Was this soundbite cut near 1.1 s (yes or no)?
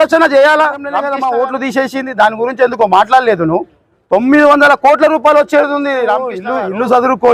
yes